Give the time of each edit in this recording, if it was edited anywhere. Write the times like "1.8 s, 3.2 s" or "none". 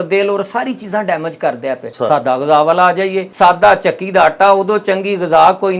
1.9 s, 3.2 s